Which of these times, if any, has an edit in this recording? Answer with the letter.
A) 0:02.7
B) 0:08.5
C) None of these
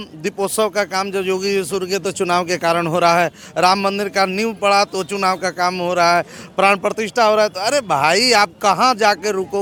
C